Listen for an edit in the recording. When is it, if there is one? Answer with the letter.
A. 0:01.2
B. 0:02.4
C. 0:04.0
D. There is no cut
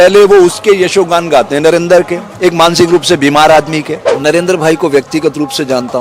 C